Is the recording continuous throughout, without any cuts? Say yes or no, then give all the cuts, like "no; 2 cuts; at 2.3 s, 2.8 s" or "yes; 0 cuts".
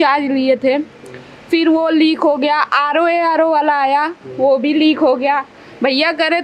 yes; 0 cuts